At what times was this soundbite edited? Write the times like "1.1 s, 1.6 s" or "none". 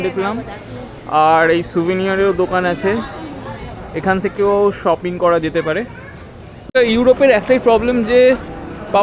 6.7 s